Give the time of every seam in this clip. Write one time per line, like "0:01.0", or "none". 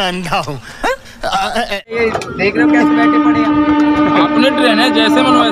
0:01.8